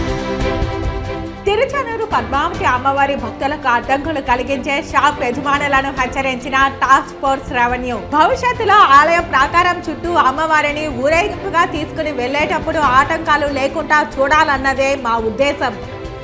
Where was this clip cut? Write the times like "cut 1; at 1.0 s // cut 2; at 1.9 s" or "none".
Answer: cut 1; at 1.2 s